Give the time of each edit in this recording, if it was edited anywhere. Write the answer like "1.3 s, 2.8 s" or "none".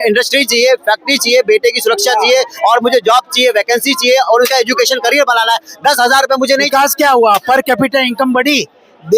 6.7 s